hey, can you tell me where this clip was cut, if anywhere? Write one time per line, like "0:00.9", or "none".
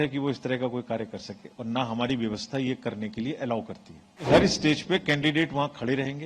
0:04.3